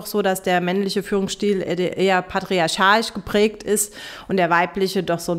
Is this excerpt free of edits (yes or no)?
yes